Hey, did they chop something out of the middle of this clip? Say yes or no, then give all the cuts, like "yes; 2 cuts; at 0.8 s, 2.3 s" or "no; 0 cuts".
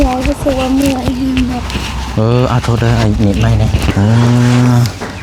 yes; 1 cut; at 3.9 s